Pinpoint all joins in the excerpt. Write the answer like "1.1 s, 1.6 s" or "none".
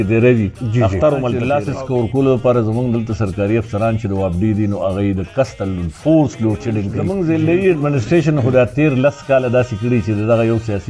1.4 s, 7.0 s